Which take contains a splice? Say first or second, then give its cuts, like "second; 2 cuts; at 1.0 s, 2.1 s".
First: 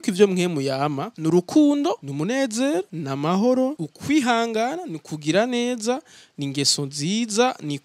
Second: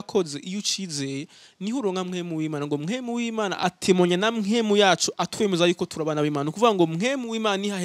first; 4 cuts; at 1.1 s, 2.1 s, 3.0 s, 3.9 s